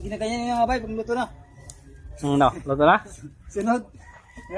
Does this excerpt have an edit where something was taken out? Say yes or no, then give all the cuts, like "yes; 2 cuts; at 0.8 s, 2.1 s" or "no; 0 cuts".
no; 0 cuts